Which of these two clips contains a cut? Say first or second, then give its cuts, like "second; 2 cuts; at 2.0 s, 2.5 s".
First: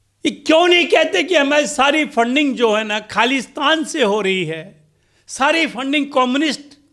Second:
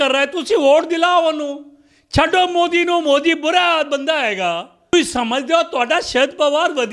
second; 1 cut; at 4.9 s